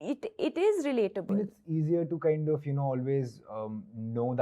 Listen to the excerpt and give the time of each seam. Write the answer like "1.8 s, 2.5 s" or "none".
1.2 s